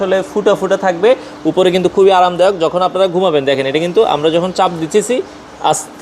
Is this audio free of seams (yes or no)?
yes